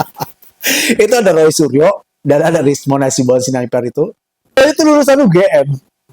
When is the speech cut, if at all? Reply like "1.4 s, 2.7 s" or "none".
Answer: 4.6 s